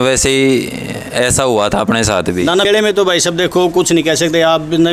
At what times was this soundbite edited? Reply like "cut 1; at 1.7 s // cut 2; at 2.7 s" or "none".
cut 1; at 2.7 s

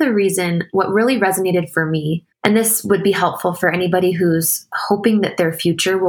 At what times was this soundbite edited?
cut 1; at 2.2 s

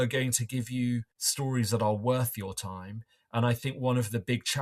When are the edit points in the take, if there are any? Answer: cut 1; at 1.2 s

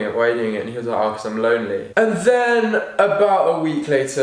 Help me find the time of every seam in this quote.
cut 1; at 1.9 s

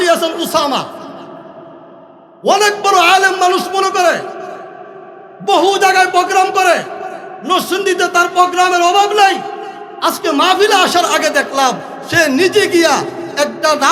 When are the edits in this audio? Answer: none

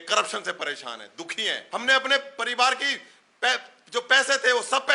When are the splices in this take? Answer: cut 1; at 1.6 s

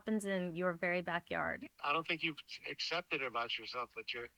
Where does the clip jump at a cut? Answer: cut 1; at 1.5 s

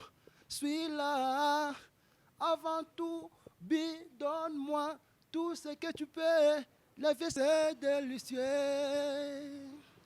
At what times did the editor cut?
cut 1; at 7.3 s

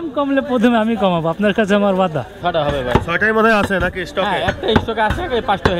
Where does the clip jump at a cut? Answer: cut 1; at 2.3 s

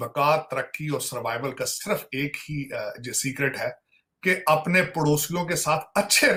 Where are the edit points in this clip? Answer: none

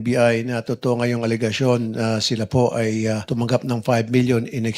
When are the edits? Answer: cut 1; at 3.2 s

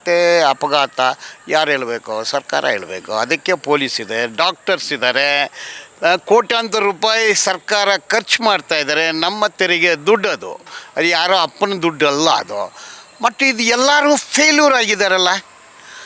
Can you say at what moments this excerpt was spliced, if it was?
none

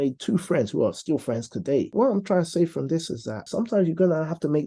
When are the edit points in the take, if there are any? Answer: cut 1; at 1.9 s // cut 2; at 3.4 s

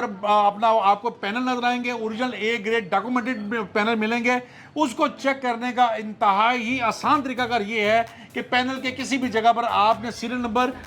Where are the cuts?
none

